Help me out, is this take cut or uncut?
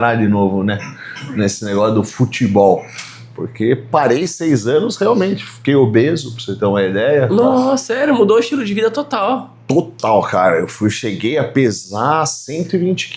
uncut